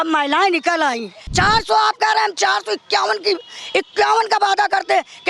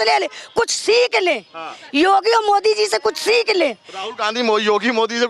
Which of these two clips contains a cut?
first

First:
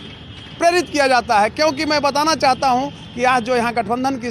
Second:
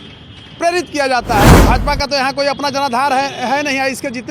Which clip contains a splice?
second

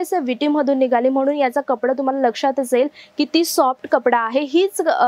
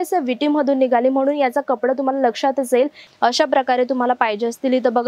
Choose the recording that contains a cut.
second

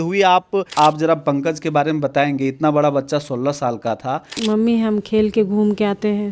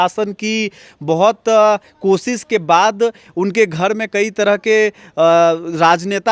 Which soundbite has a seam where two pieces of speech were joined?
first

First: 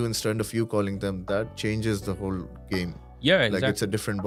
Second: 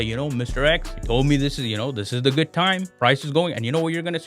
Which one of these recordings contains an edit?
second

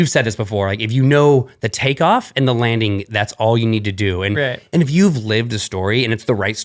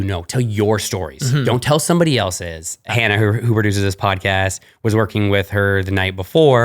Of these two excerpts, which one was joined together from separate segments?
second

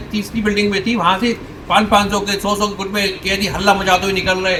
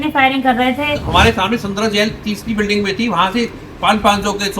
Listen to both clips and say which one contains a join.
second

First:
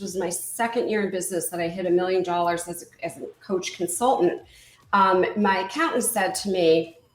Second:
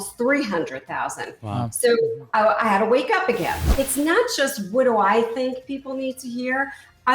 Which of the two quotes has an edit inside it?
second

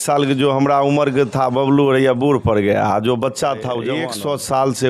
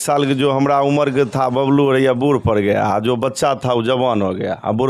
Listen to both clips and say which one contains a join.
first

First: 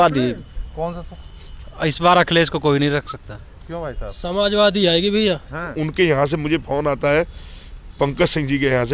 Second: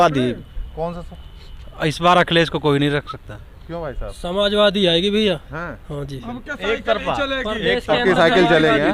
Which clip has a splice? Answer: first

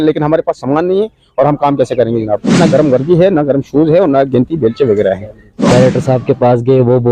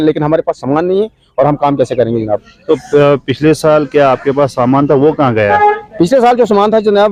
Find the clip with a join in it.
first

